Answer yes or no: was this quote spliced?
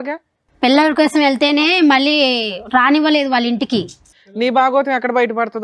yes